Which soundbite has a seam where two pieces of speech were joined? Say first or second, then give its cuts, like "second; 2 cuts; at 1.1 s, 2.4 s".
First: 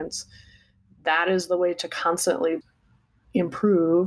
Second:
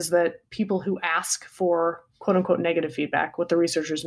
first; 1 cut; at 2.6 s